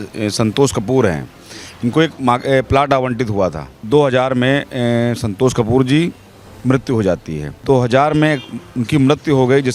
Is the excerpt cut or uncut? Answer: cut